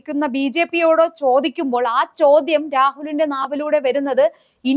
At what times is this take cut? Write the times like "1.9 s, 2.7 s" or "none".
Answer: none